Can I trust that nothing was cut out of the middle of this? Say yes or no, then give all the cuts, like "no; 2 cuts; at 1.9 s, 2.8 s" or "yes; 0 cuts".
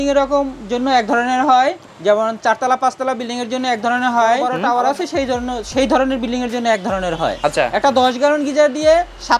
no; 3 cuts; at 1.9 s, 4.5 s, 7.4 s